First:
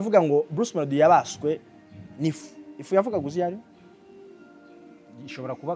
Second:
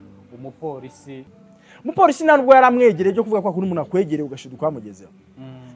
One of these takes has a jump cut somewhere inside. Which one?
second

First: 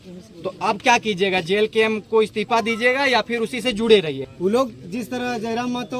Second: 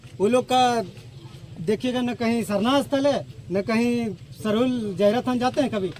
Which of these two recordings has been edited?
first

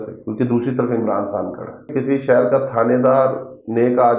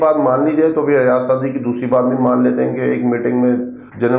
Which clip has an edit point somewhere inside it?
first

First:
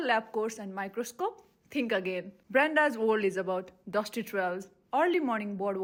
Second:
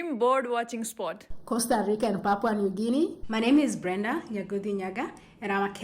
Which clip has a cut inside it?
second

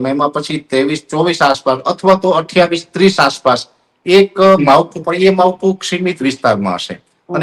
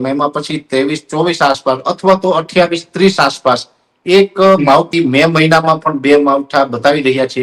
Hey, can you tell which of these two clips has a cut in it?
second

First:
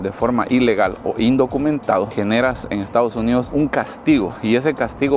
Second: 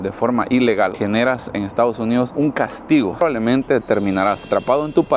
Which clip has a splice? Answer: second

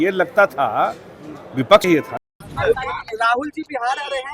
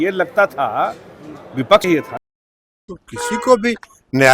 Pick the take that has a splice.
first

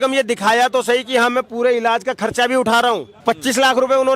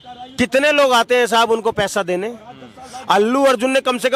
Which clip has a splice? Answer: first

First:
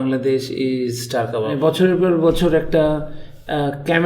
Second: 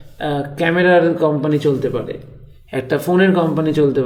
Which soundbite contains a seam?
first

